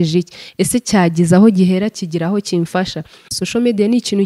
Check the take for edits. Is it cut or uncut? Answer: cut